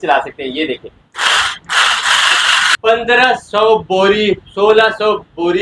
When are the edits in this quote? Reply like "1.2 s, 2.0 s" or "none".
2.7 s